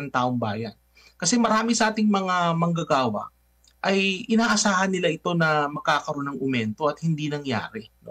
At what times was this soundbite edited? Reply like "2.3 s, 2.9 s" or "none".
none